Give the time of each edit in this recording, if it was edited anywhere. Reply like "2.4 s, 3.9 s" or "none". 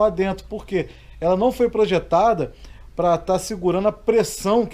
none